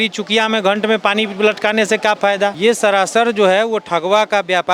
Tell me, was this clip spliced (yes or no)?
yes